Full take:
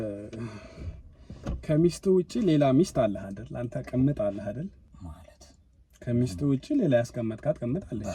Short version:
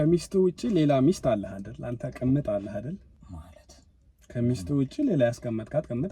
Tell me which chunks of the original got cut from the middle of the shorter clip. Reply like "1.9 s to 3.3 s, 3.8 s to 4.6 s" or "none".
none